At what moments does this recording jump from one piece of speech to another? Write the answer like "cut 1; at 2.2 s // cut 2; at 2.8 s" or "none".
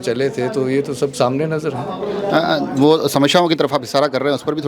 none